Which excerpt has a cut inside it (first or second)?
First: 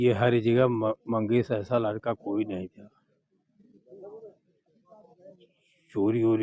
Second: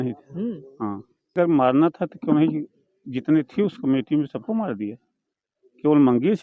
second